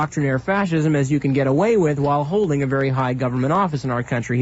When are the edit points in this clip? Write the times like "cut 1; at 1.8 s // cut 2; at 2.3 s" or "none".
none